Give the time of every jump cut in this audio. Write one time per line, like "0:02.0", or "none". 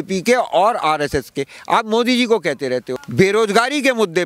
0:03.0